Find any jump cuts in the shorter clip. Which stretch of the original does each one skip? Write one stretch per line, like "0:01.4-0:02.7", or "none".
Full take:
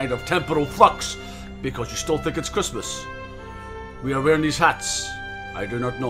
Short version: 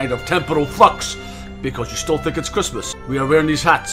0:02.9-0:03.9